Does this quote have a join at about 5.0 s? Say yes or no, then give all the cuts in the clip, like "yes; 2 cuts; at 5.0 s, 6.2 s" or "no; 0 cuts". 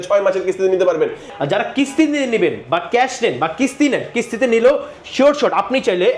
no; 1 cut; at 1.3 s